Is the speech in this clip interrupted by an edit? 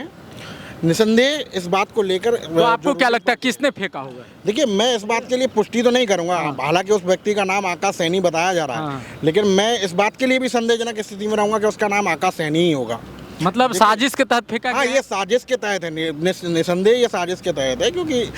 no; 0 cuts

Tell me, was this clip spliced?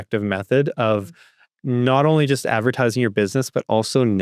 no; 0 cuts

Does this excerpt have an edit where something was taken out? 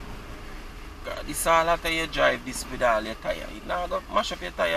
no; 0 cuts

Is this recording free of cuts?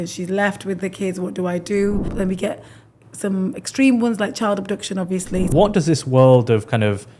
no; 2 cuts; at 2.1 s, 5.5 s

